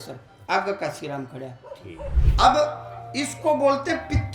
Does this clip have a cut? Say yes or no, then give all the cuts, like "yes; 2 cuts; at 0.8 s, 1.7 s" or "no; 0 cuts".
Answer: yes; 1 cut; at 2.2 s